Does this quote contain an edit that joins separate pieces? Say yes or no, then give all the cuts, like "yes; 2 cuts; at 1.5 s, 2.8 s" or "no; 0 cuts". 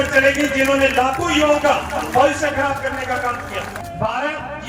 yes; 1 cut; at 3.8 s